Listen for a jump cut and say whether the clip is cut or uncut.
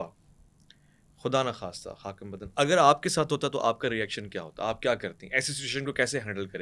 uncut